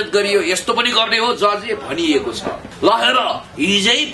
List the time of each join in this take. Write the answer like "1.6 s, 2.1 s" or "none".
2.7 s